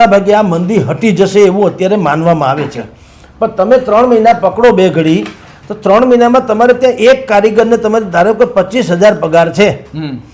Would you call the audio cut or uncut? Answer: uncut